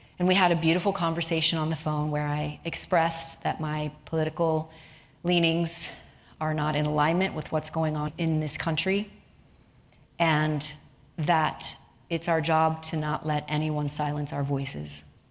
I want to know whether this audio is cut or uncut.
cut